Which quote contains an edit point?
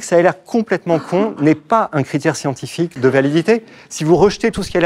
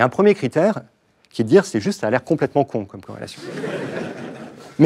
first; 1 cut; at 2.9 s

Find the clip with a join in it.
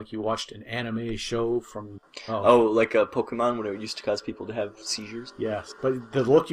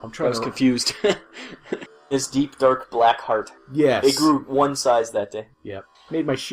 second; 1 cut; at 2.0 s

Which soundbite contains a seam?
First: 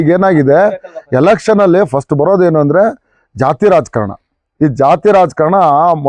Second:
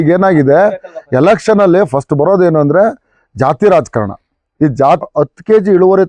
second; 1 cut; at 5.0 s

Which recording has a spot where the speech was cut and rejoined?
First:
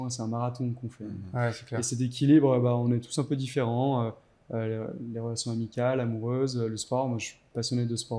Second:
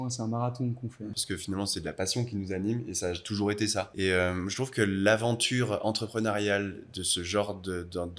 second; 2 cuts; at 1.2 s, 3.9 s

